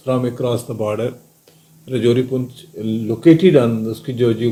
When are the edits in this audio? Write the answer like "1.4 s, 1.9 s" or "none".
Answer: none

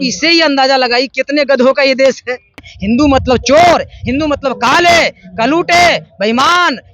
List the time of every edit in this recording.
2.7 s

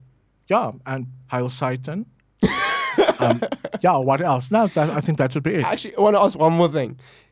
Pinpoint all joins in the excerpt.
none

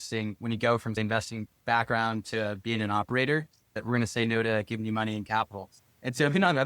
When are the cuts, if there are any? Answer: 3.8 s

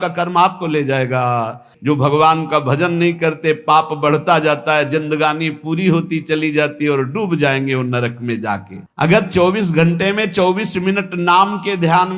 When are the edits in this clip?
1.7 s, 8.8 s

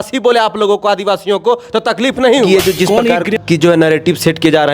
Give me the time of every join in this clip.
2.5 s

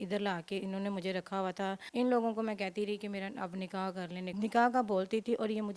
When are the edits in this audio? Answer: 1.8 s, 4.3 s

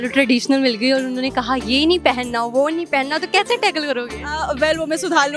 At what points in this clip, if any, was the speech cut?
none

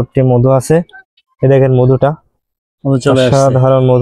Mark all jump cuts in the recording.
1.2 s

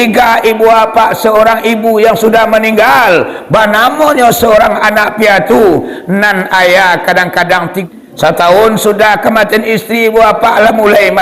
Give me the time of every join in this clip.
7.8 s

